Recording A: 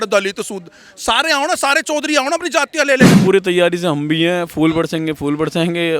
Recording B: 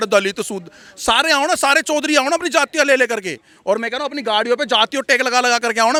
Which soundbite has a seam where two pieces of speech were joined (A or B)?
A